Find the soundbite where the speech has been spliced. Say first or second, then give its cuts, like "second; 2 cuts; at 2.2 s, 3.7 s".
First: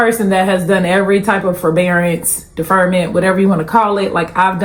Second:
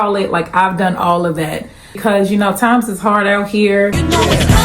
second; 1 cut; at 2.0 s